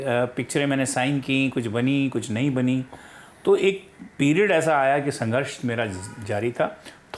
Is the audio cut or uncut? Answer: uncut